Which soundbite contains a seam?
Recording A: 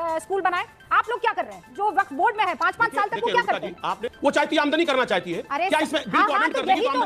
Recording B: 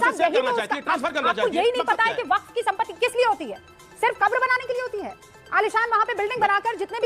A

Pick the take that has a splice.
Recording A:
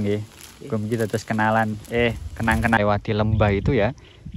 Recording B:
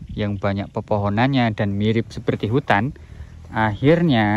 A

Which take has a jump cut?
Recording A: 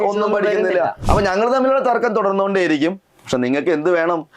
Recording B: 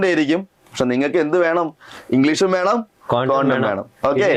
A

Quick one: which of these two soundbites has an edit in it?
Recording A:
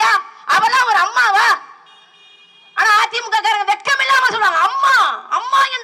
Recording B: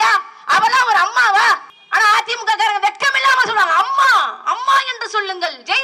B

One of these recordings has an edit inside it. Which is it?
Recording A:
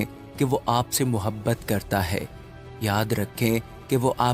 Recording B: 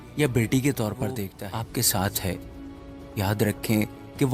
B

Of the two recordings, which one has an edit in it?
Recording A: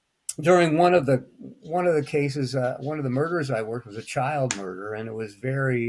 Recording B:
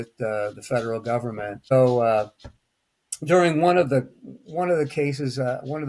B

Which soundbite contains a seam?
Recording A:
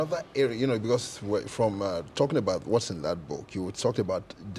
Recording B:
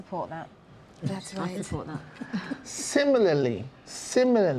A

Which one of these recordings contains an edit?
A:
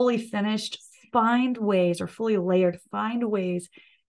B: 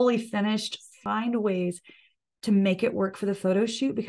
B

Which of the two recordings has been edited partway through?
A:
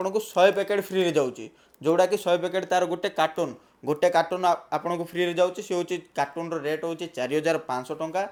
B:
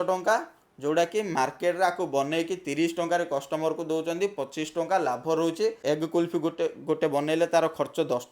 B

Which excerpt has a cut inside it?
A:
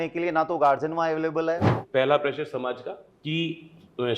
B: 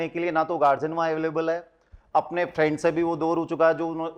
A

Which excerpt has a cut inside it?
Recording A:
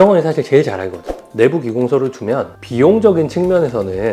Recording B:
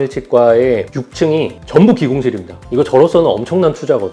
A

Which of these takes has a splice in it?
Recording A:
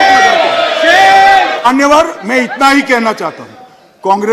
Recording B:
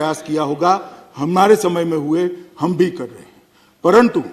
A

